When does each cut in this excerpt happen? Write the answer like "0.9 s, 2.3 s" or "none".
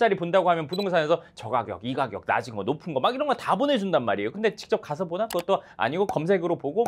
4.3 s